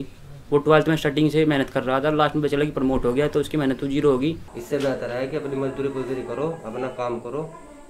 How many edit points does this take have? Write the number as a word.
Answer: one